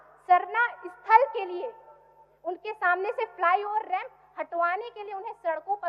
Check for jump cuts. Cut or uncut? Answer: uncut